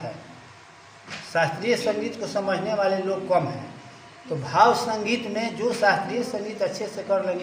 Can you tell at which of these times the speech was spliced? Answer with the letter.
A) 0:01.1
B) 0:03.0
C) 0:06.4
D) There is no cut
D